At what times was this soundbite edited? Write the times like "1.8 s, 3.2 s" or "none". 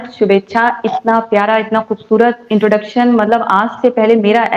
none